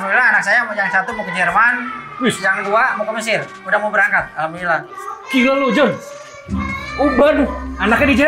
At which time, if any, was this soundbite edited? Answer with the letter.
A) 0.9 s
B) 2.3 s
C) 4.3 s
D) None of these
D